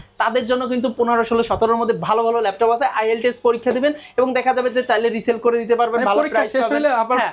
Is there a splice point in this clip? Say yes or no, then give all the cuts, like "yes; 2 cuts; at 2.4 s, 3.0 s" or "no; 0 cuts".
no; 0 cuts